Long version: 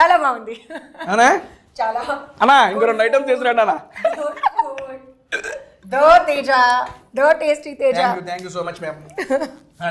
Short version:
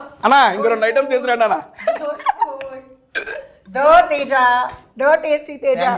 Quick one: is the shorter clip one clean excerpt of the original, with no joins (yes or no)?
yes